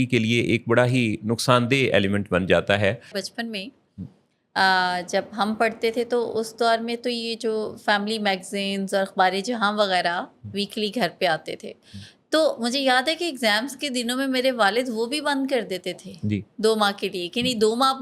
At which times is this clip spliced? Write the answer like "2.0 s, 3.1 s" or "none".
3.2 s